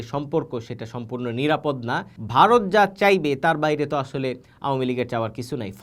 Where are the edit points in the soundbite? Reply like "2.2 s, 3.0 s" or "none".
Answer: 2.1 s